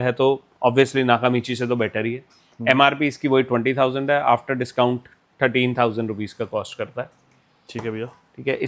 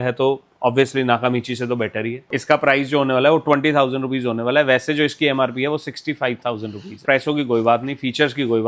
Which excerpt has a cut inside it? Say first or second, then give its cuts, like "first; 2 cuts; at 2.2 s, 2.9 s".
second; 2 cuts; at 2.2 s, 7.0 s